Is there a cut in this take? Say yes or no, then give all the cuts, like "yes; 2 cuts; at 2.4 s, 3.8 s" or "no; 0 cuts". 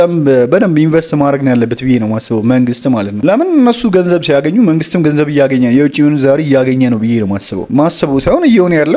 no; 0 cuts